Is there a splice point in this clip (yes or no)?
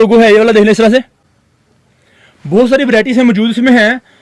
no